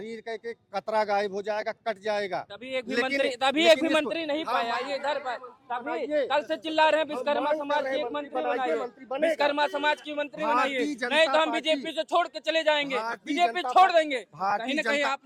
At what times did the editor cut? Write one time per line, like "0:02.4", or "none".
none